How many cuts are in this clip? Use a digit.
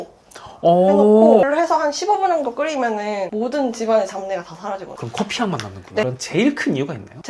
2